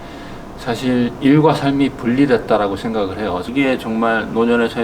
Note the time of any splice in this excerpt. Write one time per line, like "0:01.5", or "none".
0:03.5